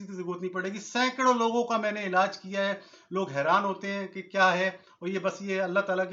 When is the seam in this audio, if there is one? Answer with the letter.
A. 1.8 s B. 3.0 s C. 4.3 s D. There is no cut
D